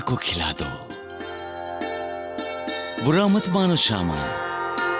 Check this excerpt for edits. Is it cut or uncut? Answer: uncut